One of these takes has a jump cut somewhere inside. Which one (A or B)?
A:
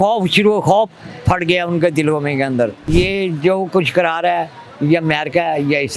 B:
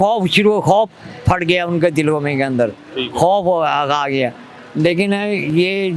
A